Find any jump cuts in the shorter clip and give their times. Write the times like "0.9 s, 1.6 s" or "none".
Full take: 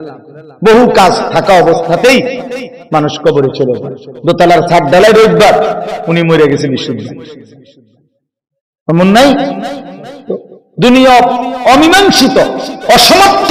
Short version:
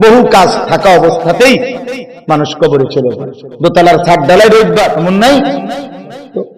5.0 s